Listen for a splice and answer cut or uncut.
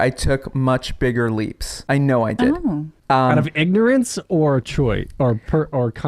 cut